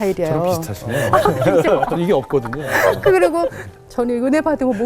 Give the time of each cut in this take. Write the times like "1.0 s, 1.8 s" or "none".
3.7 s